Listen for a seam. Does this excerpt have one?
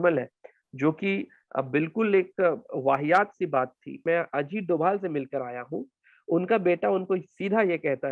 yes; 1 cut; at 3.9 s

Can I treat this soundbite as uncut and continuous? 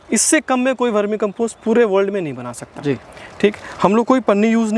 yes; 0 cuts

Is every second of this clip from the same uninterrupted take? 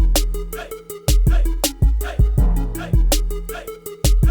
no; 1 cut; at 3.2 s

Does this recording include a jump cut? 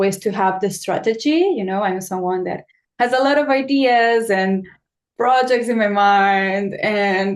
no; 0 cuts

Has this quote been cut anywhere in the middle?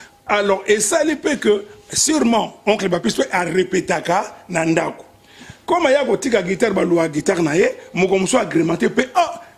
no; 0 cuts

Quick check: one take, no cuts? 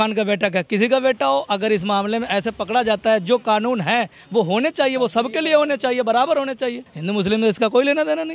no; 1 cut; at 6.9 s

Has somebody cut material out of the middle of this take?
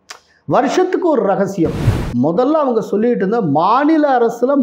yes; 1 cut; at 1.8 s

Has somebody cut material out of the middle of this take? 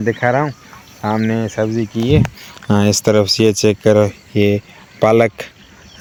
no; 0 cuts

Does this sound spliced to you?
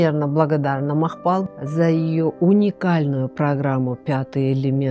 no; 0 cuts

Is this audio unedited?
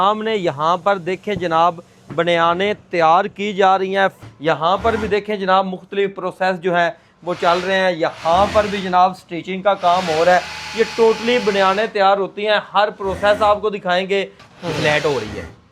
no; 2 cuts; at 4.2 s, 14.4 s

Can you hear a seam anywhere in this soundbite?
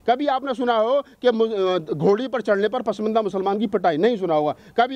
no; 0 cuts

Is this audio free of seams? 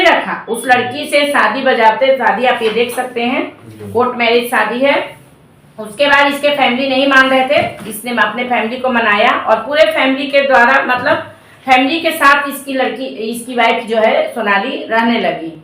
yes; 0 cuts

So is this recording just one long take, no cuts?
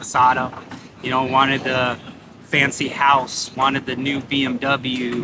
yes; 0 cuts

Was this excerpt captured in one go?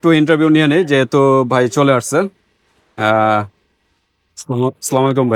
yes; 0 cuts

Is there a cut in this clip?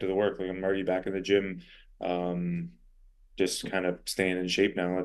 no; 0 cuts

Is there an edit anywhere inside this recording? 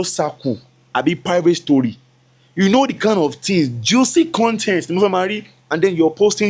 no; 0 cuts

